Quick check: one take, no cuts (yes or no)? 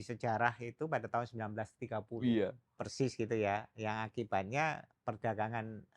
no